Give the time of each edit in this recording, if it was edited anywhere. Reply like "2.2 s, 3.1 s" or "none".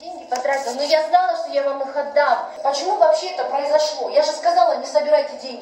2.5 s